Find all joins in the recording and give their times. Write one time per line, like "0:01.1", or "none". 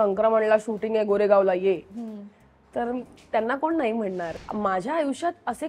0:04.4